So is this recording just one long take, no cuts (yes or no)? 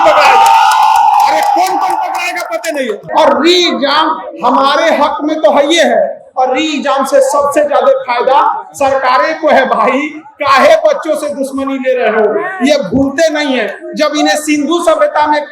no